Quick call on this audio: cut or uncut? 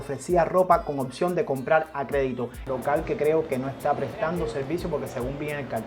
cut